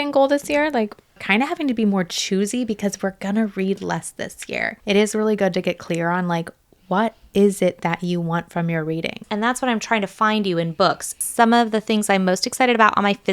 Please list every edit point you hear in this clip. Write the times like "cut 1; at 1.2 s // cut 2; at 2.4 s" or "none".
cut 1; at 1.2 s // cut 2; at 4.7 s // cut 3; at 9.2 s // cut 4; at 11.2 s